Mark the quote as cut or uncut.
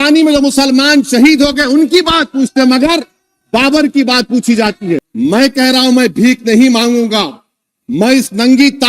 cut